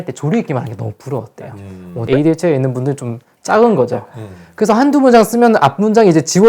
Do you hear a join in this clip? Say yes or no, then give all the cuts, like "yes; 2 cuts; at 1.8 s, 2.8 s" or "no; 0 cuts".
yes; 1 cut; at 2.0 s